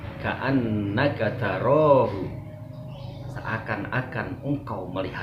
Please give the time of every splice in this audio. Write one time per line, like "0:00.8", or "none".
none